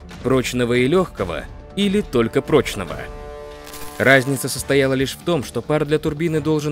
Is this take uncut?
no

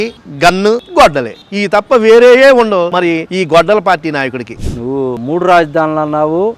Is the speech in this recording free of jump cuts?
no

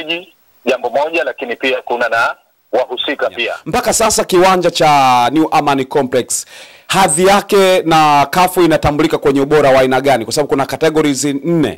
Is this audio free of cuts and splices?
no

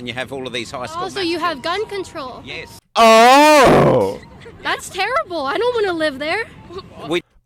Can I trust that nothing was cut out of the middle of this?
yes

